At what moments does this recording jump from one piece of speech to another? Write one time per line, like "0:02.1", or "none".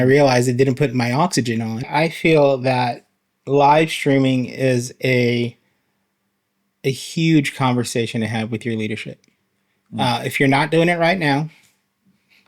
0:01.9